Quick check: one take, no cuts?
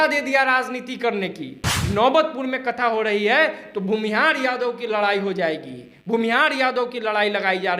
no; 1 cut; at 1.7 s

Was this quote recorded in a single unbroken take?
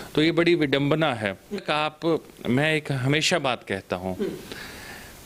no; 1 cut; at 1.6 s

